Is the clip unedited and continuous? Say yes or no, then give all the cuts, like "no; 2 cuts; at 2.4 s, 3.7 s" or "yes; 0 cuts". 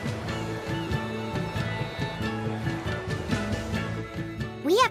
yes; 0 cuts